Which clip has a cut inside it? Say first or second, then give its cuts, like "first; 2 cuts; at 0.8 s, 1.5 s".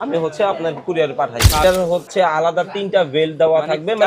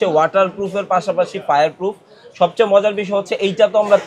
first; 1 cut; at 1.6 s